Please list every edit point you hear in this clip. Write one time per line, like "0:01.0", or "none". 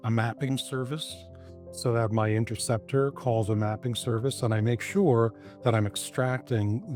none